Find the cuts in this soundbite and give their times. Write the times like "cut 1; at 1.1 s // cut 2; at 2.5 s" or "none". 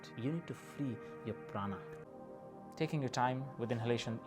cut 1; at 2.0 s